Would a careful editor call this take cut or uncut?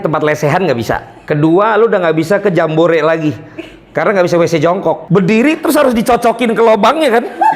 cut